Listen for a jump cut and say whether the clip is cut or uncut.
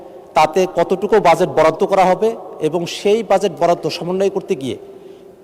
uncut